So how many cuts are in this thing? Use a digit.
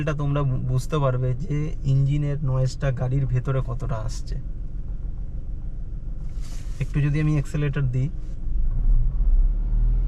0